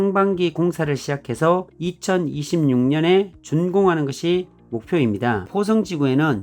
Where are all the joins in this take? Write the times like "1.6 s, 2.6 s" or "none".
5.5 s